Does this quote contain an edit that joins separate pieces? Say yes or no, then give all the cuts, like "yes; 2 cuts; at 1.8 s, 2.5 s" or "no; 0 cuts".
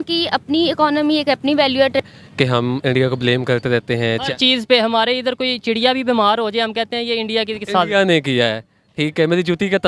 yes; 1 cut; at 2.1 s